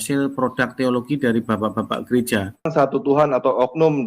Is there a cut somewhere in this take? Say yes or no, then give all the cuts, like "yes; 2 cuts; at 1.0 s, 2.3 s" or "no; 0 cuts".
yes; 1 cut; at 2.7 s